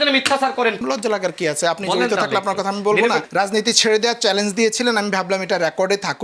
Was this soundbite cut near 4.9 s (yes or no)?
no